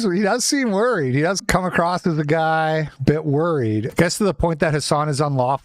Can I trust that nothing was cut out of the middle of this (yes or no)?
no